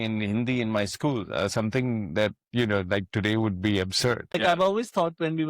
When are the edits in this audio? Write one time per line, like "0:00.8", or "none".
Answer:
0:04.4